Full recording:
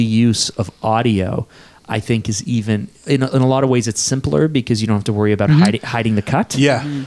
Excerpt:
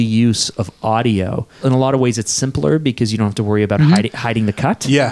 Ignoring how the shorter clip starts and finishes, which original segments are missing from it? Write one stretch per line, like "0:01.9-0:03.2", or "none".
0:01.6-0:03.3